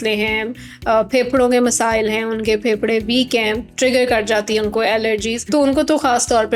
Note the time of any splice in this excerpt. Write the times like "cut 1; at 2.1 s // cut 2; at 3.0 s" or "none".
cut 1; at 5.4 s